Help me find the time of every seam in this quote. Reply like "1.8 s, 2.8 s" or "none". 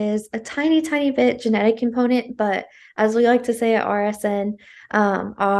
none